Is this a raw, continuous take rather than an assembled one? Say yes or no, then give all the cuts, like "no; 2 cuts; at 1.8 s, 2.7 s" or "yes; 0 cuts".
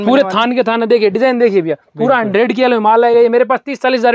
yes; 0 cuts